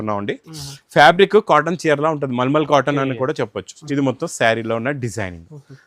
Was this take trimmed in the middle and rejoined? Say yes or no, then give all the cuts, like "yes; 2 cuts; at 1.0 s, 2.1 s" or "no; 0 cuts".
yes; 1 cut; at 3.8 s